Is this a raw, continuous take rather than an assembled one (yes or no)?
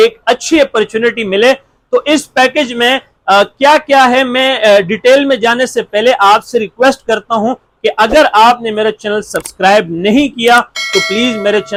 yes